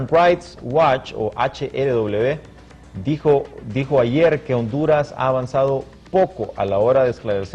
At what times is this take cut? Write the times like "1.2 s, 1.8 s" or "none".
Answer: 2.1 s